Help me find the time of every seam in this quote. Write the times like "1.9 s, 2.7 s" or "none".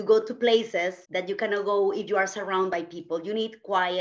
1.0 s